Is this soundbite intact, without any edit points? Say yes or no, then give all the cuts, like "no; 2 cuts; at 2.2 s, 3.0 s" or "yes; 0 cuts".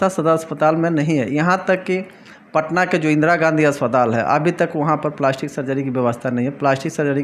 yes; 0 cuts